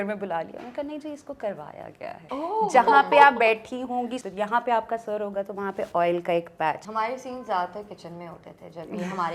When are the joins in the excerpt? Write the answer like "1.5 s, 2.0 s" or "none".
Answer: 2.2 s, 4.2 s, 6.9 s

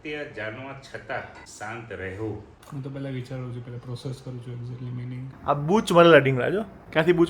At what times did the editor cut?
2.5 s, 5.3 s

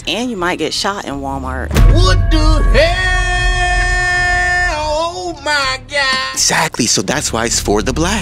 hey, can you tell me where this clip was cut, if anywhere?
none

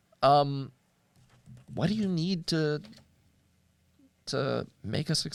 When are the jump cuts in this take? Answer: none

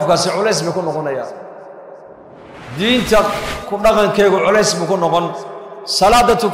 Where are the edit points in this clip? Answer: 2.5 s

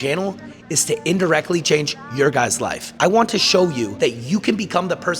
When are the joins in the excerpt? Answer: 2.8 s, 3.9 s

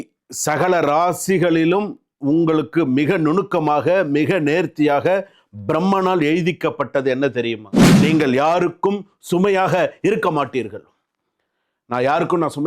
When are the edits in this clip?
7.8 s

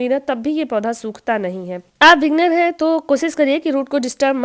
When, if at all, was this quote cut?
none

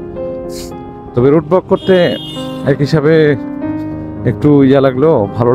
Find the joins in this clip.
1.1 s

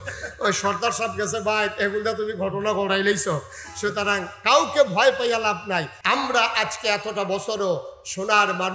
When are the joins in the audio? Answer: 5.9 s

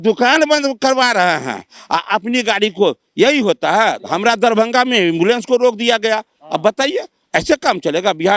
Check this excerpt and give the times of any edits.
none

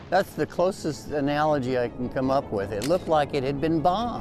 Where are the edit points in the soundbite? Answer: none

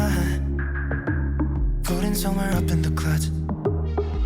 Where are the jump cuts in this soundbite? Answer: none

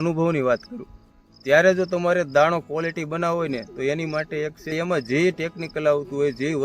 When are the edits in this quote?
4.7 s

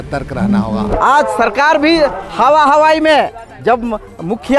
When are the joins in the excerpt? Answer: 0.9 s

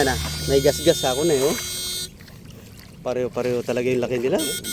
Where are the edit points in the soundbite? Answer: none

